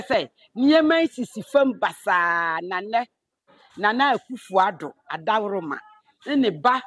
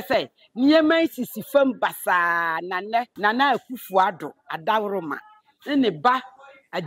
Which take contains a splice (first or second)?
second